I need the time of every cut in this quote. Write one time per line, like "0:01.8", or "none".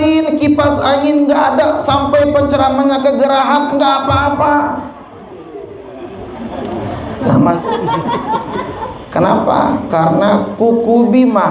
0:07.6